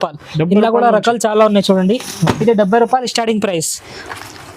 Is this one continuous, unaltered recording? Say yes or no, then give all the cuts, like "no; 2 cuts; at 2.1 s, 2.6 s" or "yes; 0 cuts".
yes; 0 cuts